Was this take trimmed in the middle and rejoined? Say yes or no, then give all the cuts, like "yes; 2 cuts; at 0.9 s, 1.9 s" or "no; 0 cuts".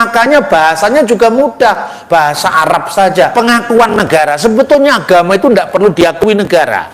yes; 1 cut; at 3.3 s